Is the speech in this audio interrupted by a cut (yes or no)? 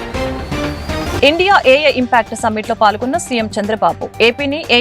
yes